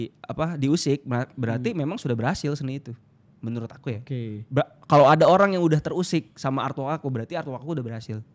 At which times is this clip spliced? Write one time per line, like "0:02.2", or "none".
none